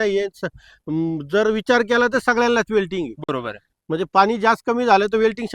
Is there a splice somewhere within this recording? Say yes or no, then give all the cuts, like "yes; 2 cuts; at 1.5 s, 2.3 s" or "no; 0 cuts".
no; 0 cuts